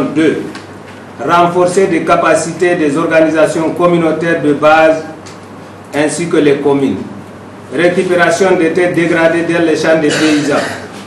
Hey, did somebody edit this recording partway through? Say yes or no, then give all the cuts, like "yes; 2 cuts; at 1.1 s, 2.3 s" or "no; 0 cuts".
no; 0 cuts